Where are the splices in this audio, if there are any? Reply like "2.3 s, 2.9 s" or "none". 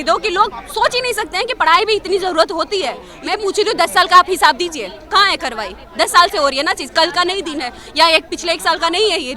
3.1 s